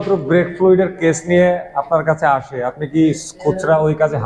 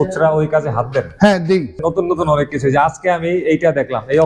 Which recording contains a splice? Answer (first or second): second